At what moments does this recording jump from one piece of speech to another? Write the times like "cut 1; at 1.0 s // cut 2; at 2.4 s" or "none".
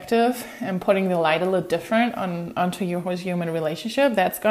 none